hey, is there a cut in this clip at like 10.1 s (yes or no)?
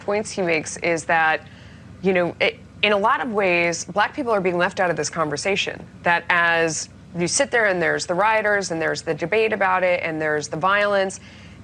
yes